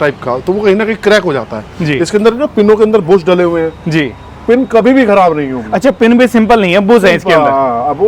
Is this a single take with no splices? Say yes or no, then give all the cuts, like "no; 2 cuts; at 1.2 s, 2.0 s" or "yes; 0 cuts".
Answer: yes; 0 cuts